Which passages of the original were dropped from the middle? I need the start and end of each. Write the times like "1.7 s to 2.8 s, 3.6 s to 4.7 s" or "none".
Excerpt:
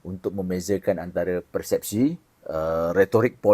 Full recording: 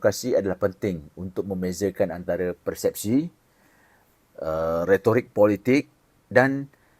3.4 s to 4.2 s